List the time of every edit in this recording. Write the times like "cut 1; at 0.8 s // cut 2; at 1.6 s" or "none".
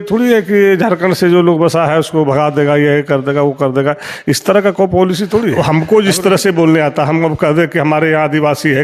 cut 1; at 5.6 s